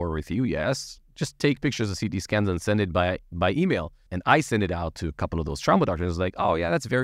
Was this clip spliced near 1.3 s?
no; 1 cut; at 4.1 s

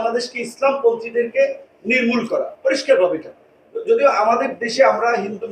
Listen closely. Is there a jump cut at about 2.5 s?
no; 0 cuts

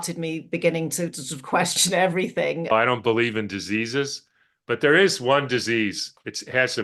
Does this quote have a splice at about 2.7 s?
yes; 1 cut; at 2.7 s

